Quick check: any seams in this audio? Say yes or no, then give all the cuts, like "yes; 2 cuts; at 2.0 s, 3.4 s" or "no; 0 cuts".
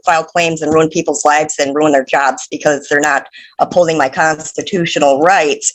no; 0 cuts